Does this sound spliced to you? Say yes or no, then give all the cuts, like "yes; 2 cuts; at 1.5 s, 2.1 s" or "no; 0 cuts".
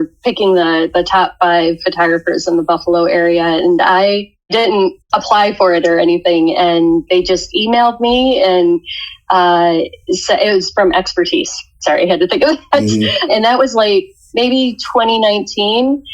yes; 4 cuts; at 4.8 s, 7.0 s, 13.3 s, 14.2 s